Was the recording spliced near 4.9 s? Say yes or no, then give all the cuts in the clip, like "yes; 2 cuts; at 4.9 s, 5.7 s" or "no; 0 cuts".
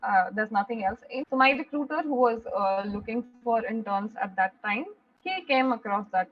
no; 1 cut; at 1.1 s